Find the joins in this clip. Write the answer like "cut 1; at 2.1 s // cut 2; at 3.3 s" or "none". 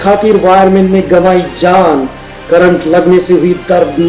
none